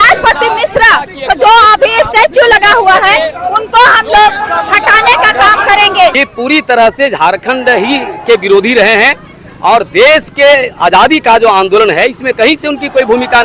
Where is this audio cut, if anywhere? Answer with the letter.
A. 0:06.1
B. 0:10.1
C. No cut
A